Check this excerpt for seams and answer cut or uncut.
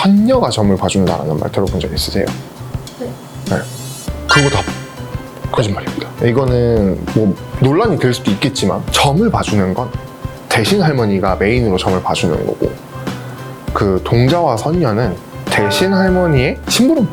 uncut